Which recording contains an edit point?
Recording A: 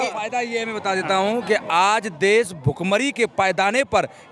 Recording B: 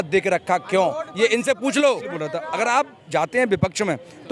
B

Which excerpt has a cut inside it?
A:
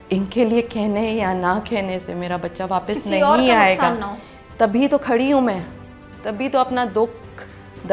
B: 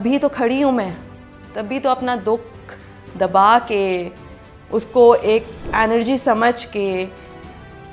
B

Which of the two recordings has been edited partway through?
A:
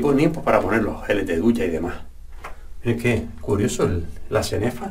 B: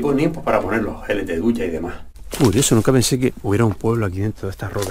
B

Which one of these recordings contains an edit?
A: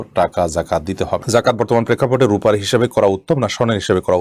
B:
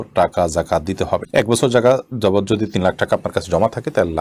A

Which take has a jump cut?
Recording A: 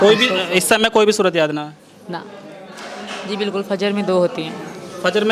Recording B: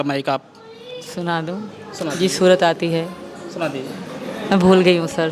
A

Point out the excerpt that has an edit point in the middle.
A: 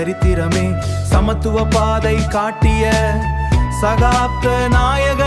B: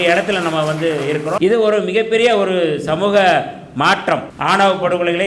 B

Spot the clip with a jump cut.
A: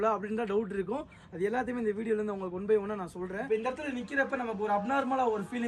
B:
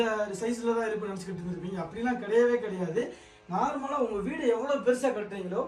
A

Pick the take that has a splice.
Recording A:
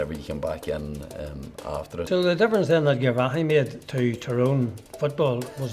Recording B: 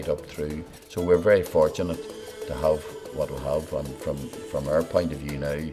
A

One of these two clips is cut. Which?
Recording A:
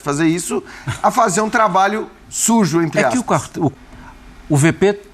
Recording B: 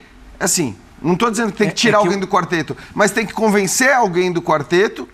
A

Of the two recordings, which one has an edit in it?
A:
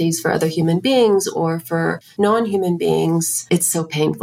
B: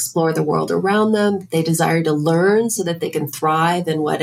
A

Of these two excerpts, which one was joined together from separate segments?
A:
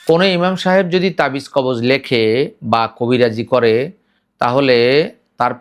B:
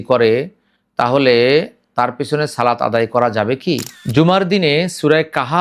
B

